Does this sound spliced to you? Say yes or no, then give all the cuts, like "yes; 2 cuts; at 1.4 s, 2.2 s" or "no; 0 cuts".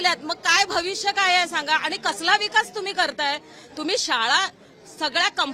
no; 0 cuts